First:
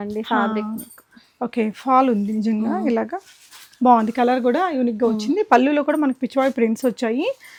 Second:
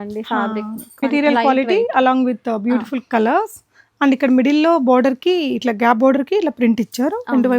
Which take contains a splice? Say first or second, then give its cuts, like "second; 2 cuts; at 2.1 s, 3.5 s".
second; 1 cut; at 1.0 s